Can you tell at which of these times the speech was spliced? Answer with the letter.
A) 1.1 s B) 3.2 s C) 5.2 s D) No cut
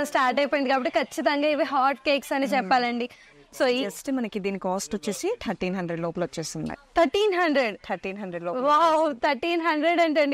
B